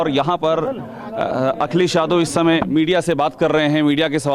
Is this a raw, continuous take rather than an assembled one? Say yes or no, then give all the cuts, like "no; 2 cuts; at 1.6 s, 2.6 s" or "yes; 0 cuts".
yes; 0 cuts